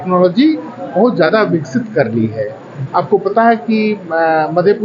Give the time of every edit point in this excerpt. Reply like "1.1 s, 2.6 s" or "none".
none